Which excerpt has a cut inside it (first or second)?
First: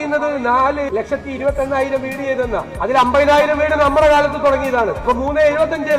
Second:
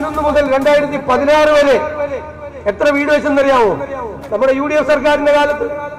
first